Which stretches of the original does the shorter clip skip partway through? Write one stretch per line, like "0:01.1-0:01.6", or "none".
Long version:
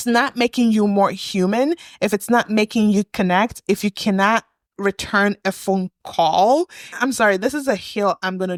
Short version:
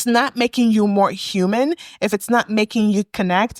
none